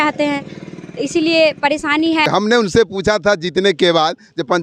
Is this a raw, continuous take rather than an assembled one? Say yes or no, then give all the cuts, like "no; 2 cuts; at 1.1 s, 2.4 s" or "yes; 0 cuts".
no; 1 cut; at 2.3 s